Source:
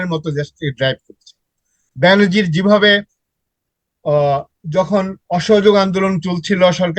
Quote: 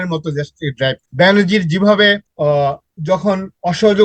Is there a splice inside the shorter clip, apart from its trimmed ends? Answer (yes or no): yes